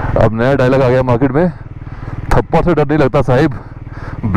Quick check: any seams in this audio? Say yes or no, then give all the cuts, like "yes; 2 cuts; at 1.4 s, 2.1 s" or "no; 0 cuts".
no; 0 cuts